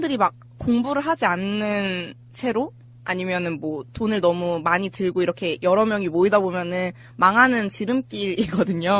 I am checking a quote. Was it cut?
yes; 1 cut; at 3.8 s

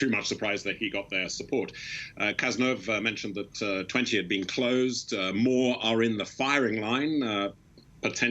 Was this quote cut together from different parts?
yes; 1 cut; at 4.2 s

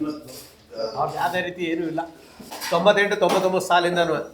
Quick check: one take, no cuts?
yes; 0 cuts

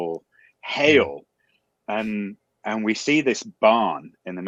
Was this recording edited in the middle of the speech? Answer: no; 0 cuts

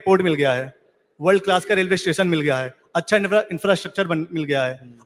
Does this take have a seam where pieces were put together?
no; 0 cuts

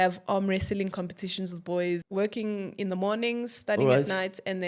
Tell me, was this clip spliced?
yes; 1 cut; at 2.0 s

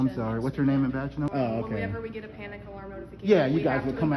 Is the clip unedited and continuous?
no; 1 cut; at 1.3 s

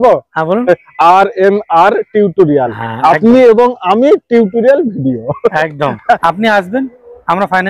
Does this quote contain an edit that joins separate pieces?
yes; 1 cut; at 6.2 s

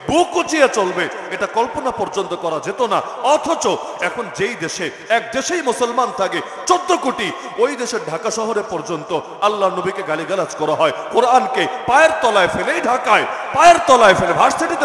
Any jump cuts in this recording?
no; 0 cuts

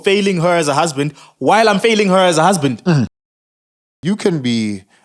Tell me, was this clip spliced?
yes; 1 cut; at 3.7 s

